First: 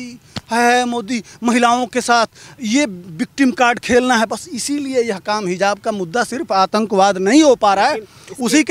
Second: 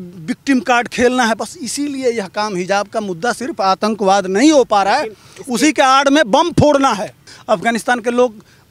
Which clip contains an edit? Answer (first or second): second